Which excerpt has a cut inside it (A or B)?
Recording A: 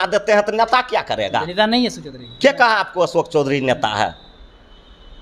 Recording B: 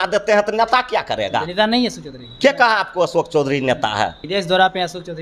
B